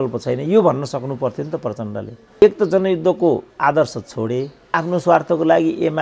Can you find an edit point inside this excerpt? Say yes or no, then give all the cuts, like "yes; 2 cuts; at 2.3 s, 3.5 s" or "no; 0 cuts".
yes; 2 cuts; at 2.4 s, 4.8 s